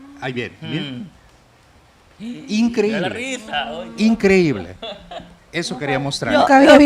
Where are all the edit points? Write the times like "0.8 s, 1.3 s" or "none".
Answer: none